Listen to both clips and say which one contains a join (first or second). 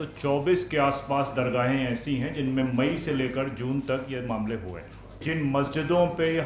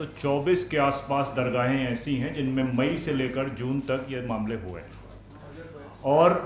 first